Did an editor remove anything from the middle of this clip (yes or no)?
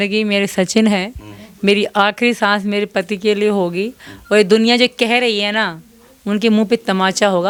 no